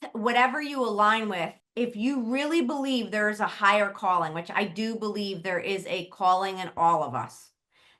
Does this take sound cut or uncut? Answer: cut